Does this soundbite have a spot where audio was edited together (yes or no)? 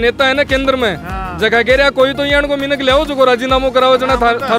no